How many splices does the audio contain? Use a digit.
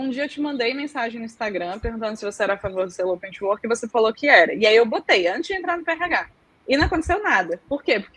0